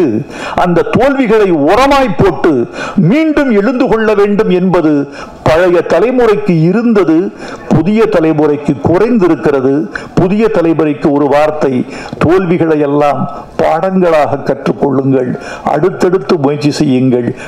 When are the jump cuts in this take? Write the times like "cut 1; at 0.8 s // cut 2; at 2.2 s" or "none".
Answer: none